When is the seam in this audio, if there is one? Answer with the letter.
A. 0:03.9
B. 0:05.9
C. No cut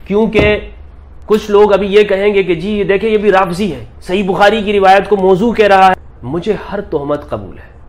B